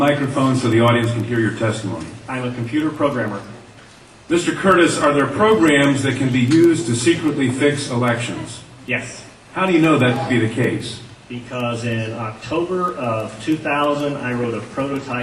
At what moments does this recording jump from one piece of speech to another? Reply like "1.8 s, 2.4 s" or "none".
none